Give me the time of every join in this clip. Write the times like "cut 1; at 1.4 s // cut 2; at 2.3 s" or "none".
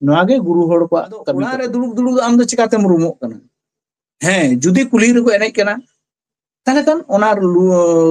cut 1; at 1.6 s